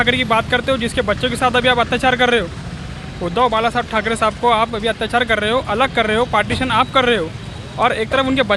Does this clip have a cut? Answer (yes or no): no